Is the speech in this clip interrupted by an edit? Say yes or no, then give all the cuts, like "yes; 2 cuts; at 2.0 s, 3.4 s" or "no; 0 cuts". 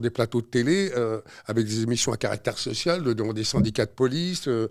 no; 0 cuts